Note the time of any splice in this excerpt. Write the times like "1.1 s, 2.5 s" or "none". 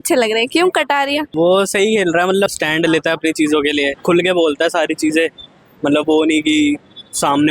1.3 s, 2.6 s, 4.0 s

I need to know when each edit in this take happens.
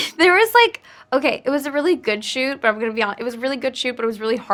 none

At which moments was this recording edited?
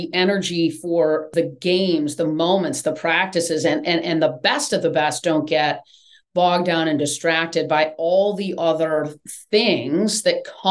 1.3 s

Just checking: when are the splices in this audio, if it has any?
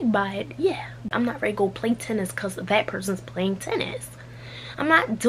1.0 s

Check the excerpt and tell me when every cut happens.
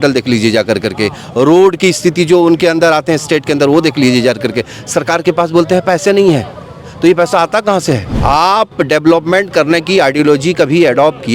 8.1 s

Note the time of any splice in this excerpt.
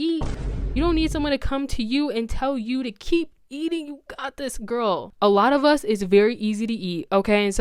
none

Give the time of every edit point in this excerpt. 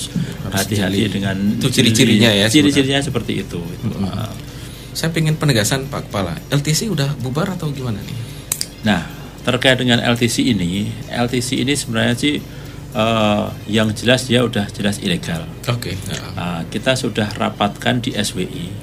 none

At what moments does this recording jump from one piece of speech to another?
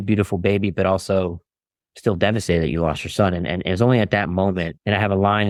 none

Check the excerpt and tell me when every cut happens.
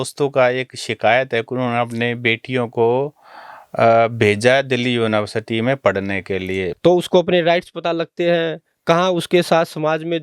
6.7 s

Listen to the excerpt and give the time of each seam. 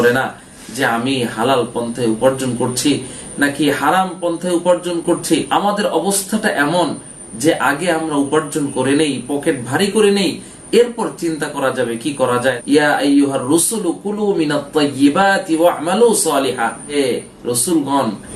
12.6 s, 16.9 s

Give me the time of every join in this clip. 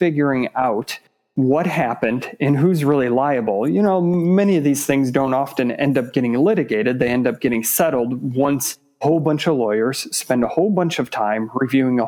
none

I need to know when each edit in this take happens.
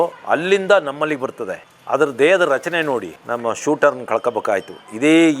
3.2 s

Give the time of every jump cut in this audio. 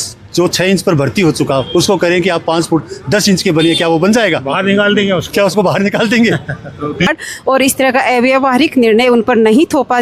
7.1 s

